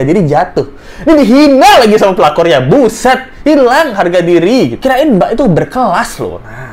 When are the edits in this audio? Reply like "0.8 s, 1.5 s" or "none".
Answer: 4.8 s